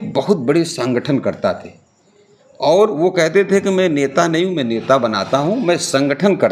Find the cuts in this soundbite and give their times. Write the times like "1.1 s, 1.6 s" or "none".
none